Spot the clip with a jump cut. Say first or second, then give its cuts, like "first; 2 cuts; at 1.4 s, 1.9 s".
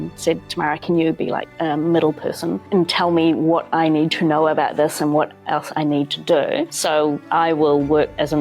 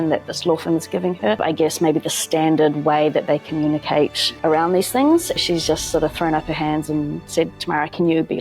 second; 2 cuts; at 1.4 s, 5.4 s